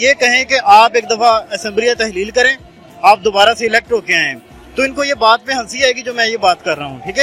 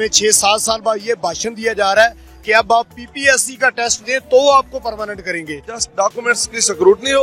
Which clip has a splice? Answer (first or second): second